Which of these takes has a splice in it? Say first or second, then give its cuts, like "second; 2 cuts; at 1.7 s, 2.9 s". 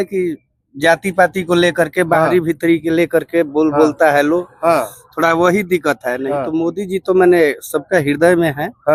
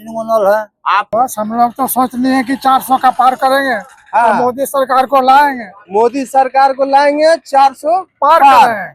second; 1 cut; at 1.1 s